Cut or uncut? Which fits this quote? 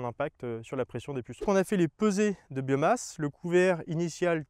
cut